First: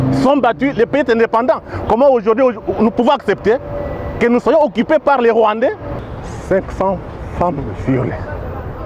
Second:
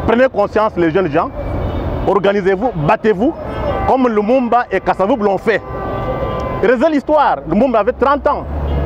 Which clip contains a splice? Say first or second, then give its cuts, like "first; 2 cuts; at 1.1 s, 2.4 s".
first; 1 cut; at 5.9 s